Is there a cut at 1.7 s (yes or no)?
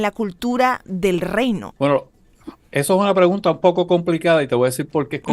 yes